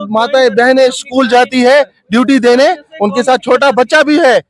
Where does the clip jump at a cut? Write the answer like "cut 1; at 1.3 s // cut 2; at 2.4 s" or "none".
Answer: none